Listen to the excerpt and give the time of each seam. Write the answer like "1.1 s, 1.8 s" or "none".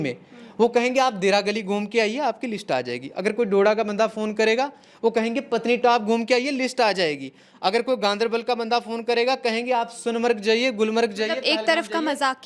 none